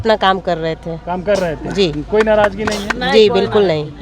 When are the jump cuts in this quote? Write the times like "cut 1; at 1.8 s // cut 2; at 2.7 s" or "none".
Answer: none